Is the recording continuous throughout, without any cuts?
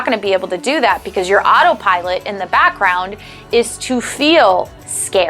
yes; 0 cuts

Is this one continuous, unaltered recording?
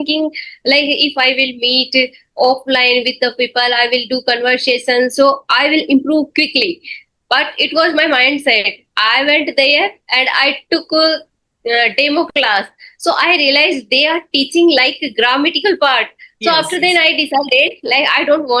yes; 0 cuts

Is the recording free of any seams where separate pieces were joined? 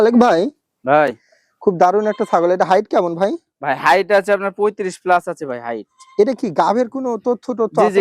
yes; 0 cuts

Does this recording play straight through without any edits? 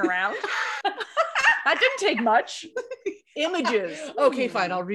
yes; 0 cuts

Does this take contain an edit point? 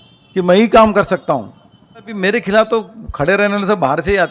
yes; 1 cut; at 2.1 s

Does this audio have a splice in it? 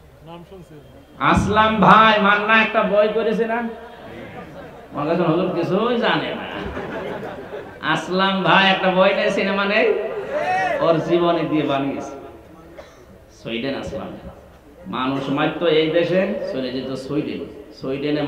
no; 0 cuts

